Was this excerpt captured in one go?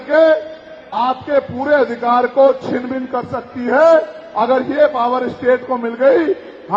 yes; 0 cuts

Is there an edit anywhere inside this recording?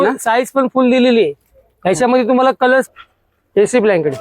yes; 1 cut; at 2.9 s

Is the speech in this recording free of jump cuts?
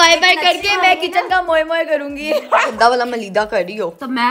no; 1 cut; at 2.7 s

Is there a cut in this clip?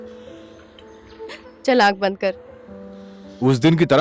no; 0 cuts

